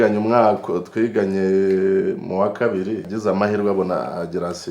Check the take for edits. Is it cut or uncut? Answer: cut